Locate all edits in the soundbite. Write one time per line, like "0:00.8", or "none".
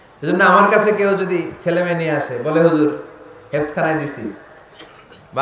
none